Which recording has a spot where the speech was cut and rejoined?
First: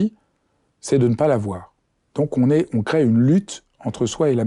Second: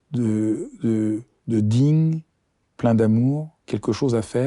second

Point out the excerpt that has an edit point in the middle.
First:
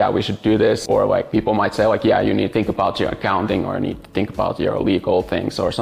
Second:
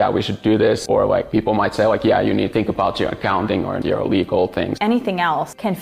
second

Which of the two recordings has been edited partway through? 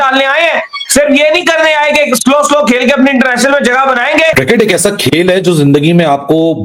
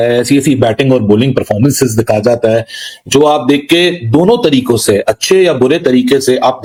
first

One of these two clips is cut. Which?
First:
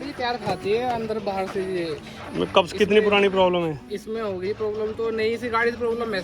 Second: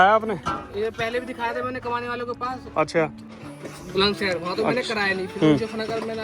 second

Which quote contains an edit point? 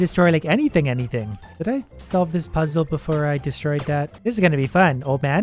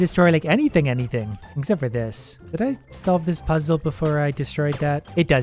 first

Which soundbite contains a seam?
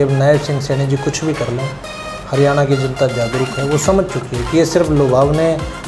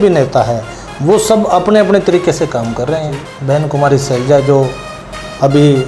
second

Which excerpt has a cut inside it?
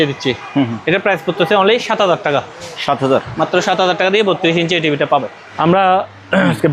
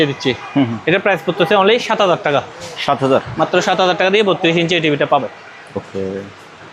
first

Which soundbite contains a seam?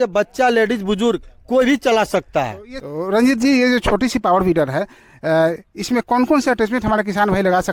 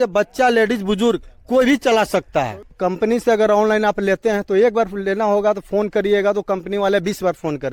second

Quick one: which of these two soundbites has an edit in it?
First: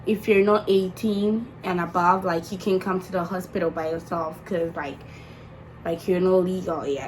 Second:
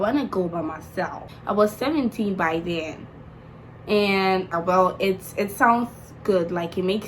second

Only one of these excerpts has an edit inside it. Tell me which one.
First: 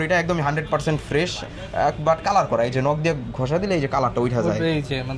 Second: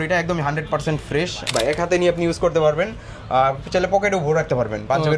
second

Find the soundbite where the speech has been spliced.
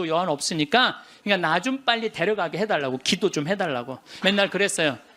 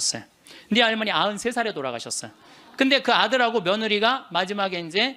first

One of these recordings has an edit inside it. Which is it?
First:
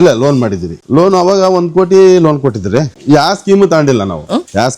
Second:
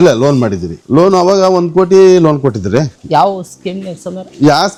first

